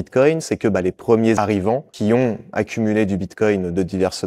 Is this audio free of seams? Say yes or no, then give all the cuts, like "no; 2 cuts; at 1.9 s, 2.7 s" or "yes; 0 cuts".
no; 1 cut; at 1.4 s